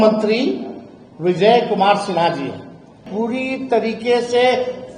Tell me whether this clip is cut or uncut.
cut